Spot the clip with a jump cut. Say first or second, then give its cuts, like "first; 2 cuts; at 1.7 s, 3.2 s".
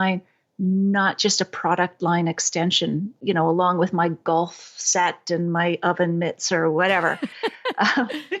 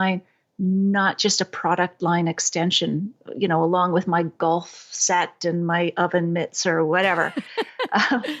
first; 1 cut; at 3.1 s